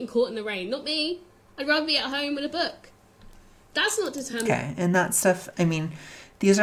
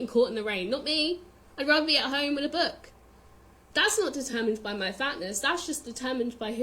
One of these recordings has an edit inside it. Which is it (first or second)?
second